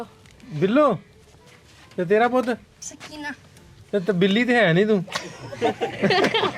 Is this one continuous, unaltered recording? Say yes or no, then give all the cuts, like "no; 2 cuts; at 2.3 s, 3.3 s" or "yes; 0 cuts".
yes; 0 cuts